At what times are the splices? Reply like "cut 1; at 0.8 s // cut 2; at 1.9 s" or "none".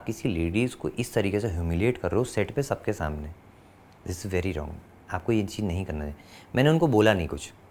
none